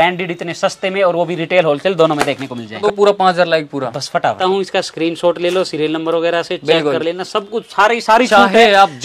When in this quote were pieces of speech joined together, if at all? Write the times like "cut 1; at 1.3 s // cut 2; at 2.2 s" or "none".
cut 1; at 2.8 s // cut 2; at 4.4 s